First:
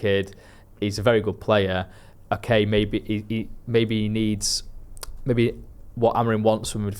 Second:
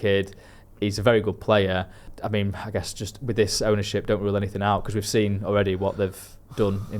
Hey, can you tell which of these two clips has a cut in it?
second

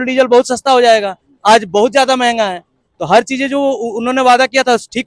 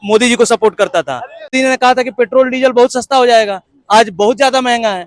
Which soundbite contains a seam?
second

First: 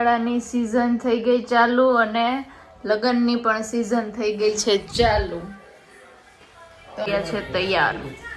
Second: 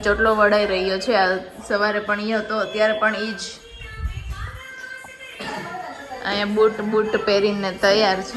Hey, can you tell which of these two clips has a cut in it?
first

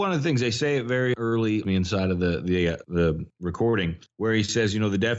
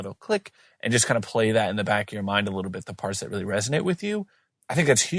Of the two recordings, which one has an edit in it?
first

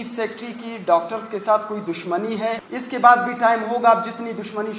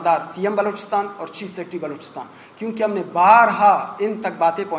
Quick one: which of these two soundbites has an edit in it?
first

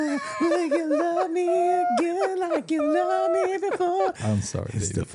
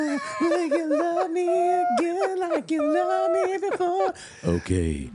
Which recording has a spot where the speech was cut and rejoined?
first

